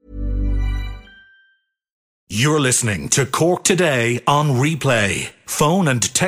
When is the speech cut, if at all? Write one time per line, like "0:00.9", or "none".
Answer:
0:02.1